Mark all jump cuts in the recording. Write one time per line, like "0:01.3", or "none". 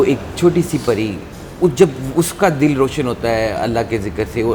none